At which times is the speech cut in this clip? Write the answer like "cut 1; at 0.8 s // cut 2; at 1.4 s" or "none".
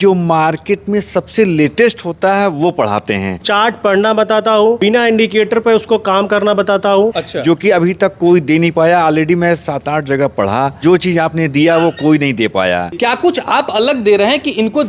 cut 1; at 3.3 s // cut 2; at 4.8 s // cut 3; at 7.3 s // cut 4; at 10.7 s // cut 5; at 12.9 s